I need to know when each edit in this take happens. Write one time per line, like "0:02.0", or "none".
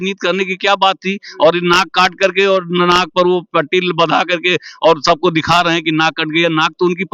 none